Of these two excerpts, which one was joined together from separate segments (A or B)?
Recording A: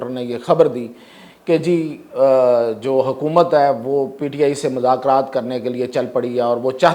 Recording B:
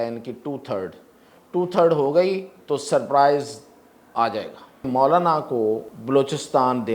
B